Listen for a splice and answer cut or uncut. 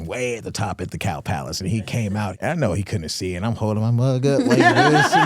cut